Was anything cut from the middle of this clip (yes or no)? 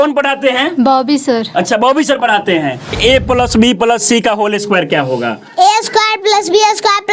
yes